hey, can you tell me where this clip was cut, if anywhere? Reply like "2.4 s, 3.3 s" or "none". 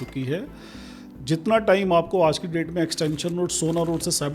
1.0 s